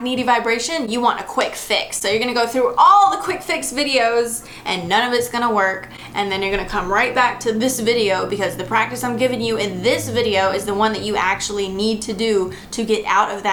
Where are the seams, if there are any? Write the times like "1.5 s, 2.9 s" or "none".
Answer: none